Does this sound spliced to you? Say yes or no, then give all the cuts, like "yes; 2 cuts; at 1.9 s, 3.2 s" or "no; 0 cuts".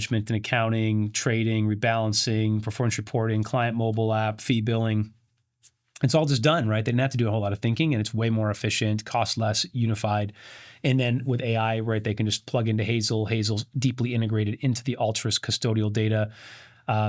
no; 0 cuts